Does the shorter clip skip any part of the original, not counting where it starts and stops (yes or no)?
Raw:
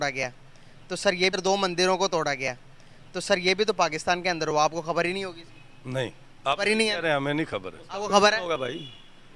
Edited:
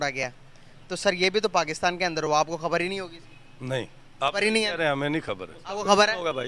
yes